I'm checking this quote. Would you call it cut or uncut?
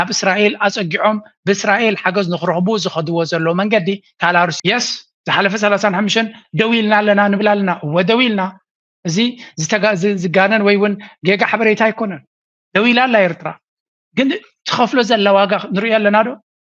cut